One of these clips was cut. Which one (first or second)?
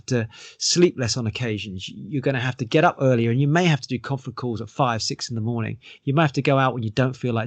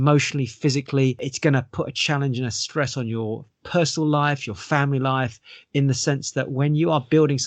second